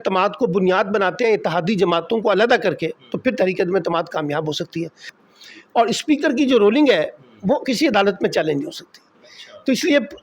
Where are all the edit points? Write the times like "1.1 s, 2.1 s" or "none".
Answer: 5.1 s